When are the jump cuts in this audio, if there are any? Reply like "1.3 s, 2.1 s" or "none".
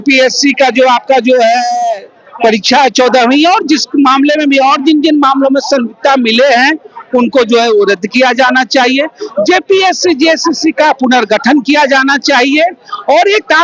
none